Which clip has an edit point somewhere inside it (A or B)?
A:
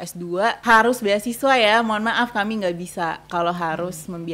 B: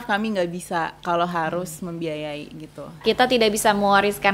B